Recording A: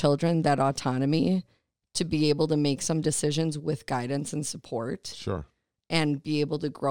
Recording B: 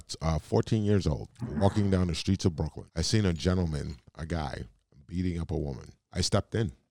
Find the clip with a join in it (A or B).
B